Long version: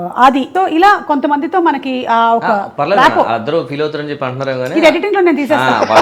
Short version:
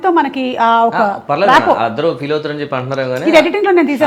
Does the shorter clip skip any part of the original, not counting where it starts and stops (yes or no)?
no